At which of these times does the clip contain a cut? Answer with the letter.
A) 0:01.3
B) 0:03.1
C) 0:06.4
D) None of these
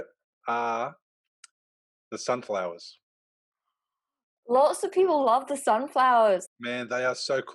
C